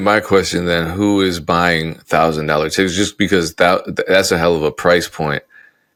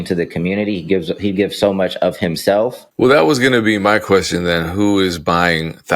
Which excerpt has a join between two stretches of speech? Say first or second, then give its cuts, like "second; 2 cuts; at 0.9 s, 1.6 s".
second; 1 cut; at 2.8 s